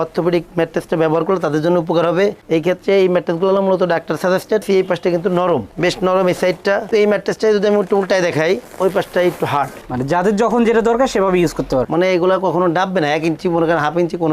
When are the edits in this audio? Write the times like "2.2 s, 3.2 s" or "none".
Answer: 4.6 s, 6.9 s, 11.9 s